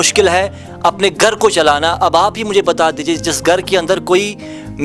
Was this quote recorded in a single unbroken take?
yes; 0 cuts

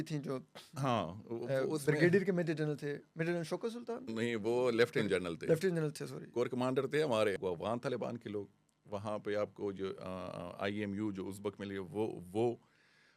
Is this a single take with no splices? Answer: no; 1 cut; at 7.4 s

